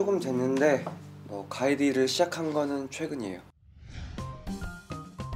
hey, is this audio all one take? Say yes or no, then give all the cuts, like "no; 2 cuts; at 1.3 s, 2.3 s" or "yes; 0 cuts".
no; 1 cut; at 3.4 s